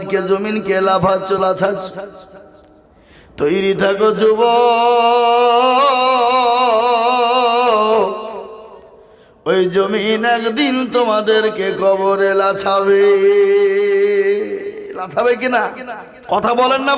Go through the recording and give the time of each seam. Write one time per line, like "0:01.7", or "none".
none